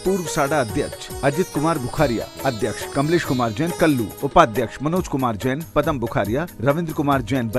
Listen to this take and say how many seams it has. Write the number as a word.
two